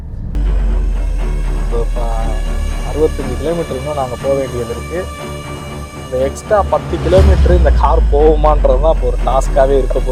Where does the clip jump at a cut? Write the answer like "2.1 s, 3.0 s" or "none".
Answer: none